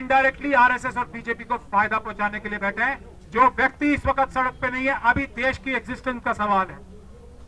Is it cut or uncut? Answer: uncut